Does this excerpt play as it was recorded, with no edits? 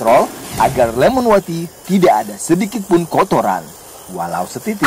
yes; 0 cuts

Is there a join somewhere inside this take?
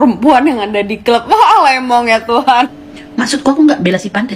yes; 1 cut; at 2.7 s

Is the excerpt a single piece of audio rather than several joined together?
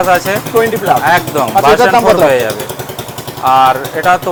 yes; 0 cuts

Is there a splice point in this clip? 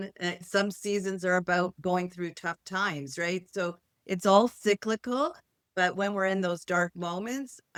no; 0 cuts

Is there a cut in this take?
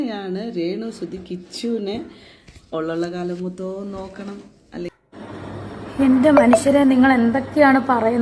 yes; 1 cut; at 5.0 s

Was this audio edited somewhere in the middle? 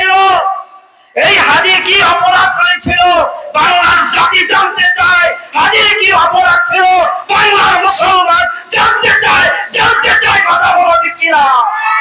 no; 0 cuts

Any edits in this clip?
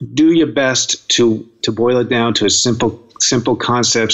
yes; 1 cut; at 1.5 s

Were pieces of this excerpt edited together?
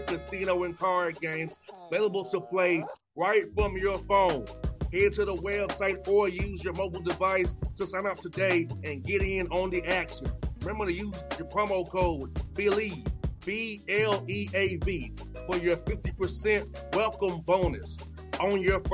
no; 0 cuts

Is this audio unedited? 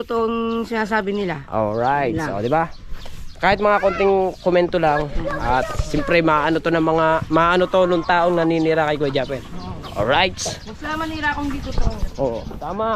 yes; 0 cuts

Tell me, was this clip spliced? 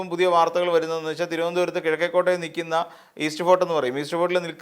no; 0 cuts

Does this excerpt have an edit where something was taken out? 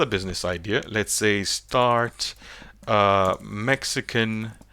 no; 0 cuts

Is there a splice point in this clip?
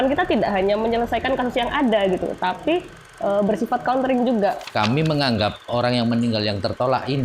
yes; 1 cut; at 4.6 s

